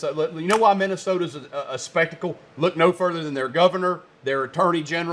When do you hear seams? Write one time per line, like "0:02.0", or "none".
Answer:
none